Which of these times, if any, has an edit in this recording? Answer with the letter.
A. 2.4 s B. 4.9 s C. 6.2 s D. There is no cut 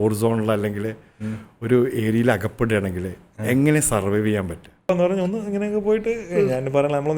B